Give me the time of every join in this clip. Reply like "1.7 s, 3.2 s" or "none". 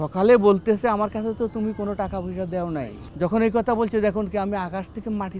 3.0 s